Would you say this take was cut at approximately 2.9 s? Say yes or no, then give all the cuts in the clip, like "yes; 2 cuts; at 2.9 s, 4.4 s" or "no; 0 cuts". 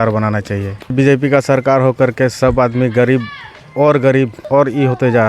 no; 2 cuts; at 0.9 s, 4.4 s